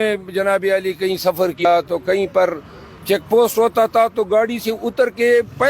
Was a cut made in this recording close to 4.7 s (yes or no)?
no